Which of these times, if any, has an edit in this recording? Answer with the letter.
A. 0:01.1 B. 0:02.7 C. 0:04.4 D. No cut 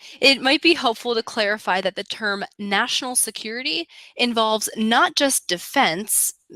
C